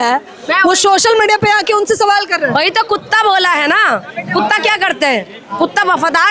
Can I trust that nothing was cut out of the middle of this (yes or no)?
yes